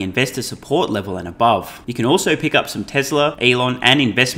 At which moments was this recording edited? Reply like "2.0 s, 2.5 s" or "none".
1.8 s, 3.4 s

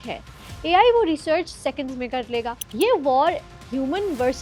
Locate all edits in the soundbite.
2.6 s

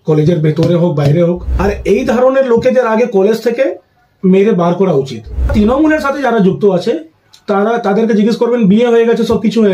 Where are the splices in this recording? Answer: 1.5 s, 5.5 s

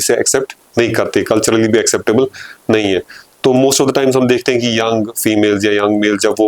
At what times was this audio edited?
none

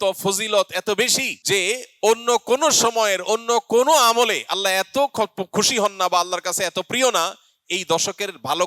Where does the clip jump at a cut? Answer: 1.3 s

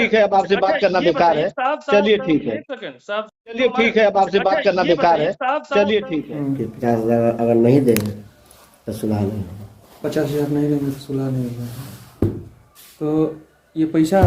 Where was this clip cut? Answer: 6.3 s

